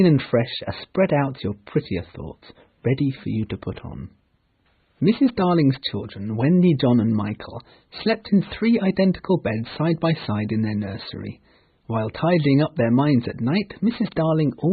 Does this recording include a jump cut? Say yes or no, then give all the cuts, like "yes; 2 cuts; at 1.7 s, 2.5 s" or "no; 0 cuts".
yes; 1 cut; at 10.5 s